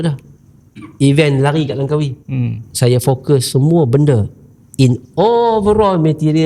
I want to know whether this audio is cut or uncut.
cut